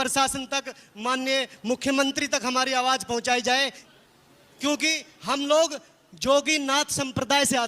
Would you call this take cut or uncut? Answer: cut